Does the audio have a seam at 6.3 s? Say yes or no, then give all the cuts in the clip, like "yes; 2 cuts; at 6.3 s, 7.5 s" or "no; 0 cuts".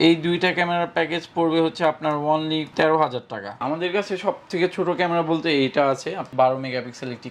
yes; 2 cuts; at 3.6 s, 6.3 s